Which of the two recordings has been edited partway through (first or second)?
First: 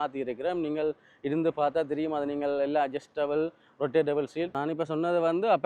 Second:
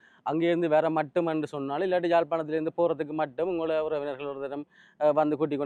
first